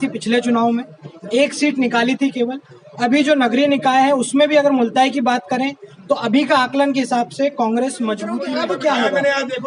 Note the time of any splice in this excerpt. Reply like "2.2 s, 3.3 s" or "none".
8.4 s